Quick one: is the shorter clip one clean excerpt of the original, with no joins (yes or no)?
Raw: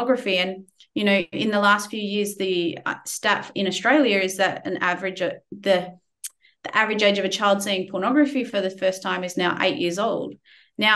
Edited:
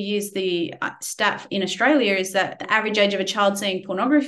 no